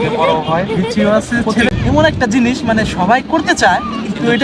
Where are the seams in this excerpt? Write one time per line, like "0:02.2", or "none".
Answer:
0:01.7